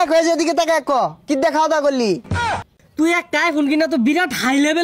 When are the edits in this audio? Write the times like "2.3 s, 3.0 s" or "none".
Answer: 2.4 s